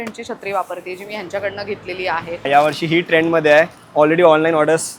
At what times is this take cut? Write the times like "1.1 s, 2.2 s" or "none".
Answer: 2.4 s